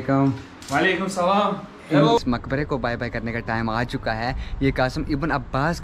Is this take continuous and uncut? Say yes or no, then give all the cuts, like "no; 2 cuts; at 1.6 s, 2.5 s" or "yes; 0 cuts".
no; 1 cut; at 2.2 s